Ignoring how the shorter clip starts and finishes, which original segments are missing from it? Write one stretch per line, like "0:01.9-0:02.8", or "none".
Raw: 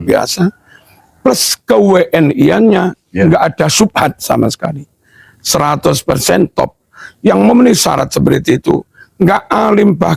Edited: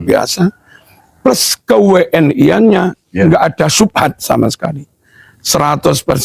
none

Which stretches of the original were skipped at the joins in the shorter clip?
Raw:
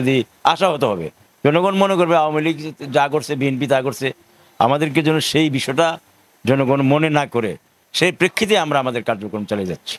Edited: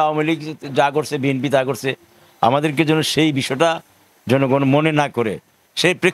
none

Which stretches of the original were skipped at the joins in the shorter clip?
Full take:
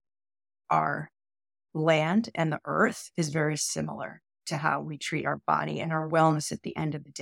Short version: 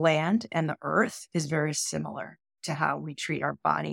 none

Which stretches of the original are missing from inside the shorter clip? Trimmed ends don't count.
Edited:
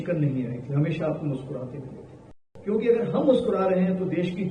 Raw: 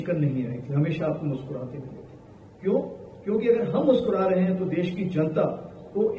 0:02.4-0:03.0

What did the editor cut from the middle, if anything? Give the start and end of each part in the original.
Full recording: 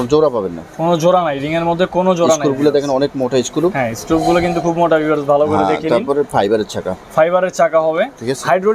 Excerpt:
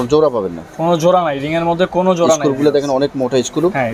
none

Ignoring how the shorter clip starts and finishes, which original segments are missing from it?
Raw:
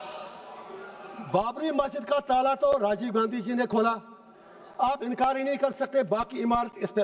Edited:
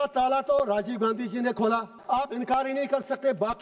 0:04.1-0:04.6

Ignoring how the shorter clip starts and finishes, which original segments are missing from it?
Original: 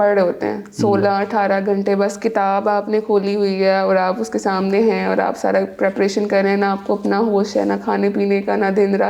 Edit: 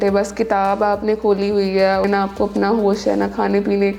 0:03.9-0:06.5

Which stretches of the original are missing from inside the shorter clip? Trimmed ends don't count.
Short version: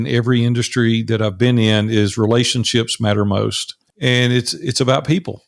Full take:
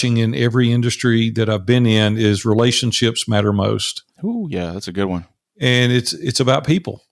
0:04.0-0:05.4

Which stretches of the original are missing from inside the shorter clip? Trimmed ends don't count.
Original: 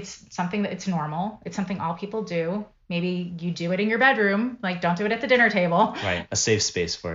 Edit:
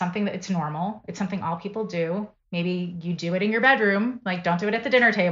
none

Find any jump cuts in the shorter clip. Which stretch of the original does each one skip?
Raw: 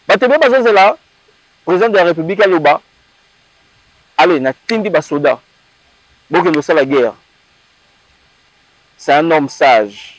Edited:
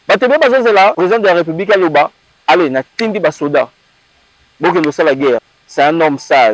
0:01.0-0:01.7
0:03.0-0:04.0
0:07.3-0:08.9

